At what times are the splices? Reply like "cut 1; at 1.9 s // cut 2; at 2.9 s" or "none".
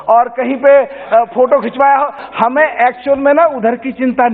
cut 1; at 2.2 s